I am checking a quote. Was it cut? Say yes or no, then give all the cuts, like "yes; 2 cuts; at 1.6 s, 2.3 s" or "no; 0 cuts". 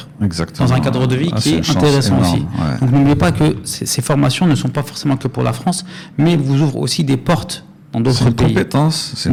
no; 0 cuts